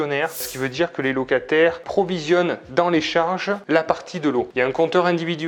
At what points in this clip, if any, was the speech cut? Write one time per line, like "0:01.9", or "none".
none

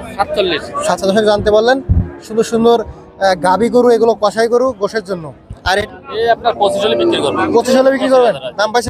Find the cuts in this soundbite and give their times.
0:01.0
0:05.8

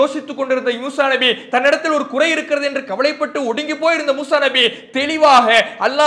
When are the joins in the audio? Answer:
none

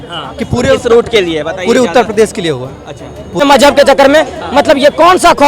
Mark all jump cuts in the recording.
0:03.4

